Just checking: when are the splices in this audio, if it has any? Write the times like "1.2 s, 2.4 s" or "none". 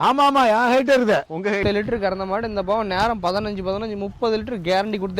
1.6 s